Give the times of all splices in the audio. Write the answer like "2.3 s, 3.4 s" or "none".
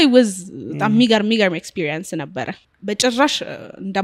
2.6 s